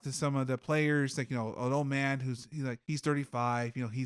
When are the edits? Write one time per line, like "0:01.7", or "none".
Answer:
0:02.8